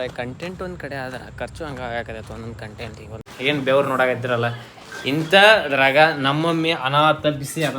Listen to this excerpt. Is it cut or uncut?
cut